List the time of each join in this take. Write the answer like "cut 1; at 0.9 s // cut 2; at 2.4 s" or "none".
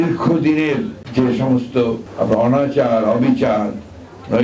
cut 1; at 1.0 s // cut 2; at 2.0 s